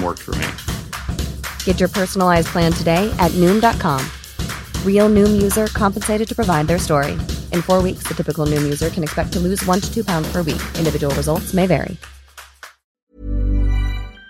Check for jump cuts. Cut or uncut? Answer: cut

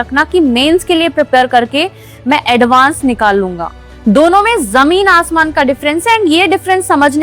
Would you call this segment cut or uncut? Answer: uncut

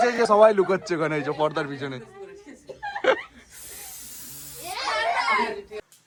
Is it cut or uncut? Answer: uncut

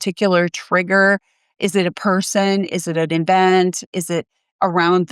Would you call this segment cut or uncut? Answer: cut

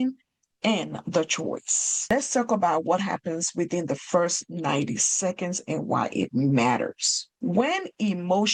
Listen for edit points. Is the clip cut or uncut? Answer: uncut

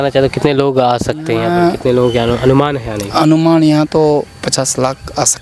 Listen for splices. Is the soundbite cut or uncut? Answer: uncut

